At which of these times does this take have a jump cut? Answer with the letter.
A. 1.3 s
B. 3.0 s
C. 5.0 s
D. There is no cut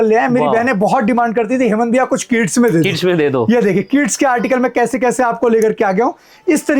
D